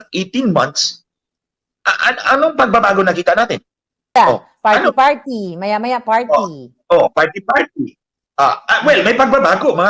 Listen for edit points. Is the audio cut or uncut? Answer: cut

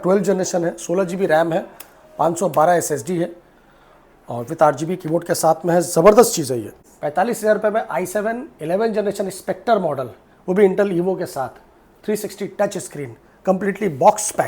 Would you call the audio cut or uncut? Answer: cut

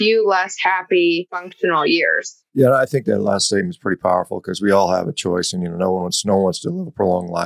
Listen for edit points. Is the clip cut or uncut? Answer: cut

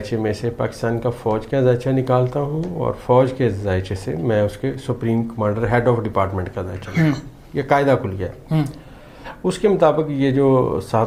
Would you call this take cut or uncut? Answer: uncut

